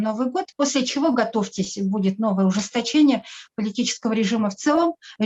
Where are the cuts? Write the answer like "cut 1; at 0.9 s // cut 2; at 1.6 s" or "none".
none